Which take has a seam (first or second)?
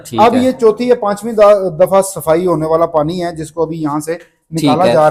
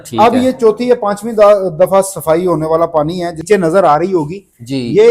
second